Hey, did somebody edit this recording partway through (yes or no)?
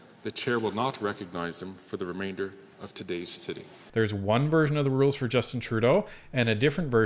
yes